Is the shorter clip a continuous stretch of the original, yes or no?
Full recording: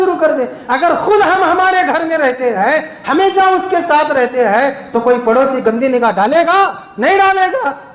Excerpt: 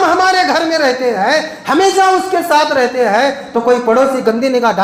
yes